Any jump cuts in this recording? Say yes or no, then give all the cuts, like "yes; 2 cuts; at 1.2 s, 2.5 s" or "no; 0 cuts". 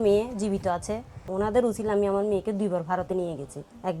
yes; 1 cut; at 1.2 s